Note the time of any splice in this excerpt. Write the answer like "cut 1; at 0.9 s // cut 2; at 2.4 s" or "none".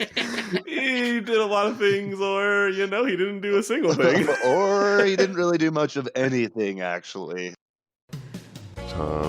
cut 1; at 7.6 s